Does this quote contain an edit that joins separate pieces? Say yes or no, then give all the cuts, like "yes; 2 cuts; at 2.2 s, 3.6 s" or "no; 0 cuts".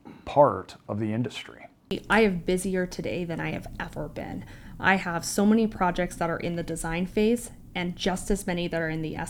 yes; 1 cut; at 1.9 s